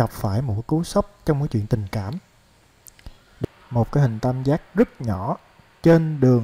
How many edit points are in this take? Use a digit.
1